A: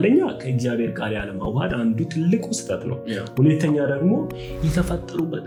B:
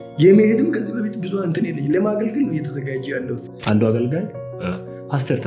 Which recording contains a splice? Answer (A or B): B